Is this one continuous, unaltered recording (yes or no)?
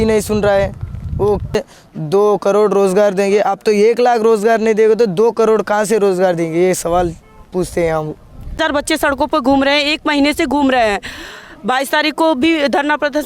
no